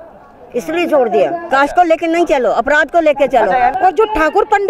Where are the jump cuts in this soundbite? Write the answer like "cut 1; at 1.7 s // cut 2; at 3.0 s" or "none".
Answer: cut 1; at 1.4 s // cut 2; at 3.7 s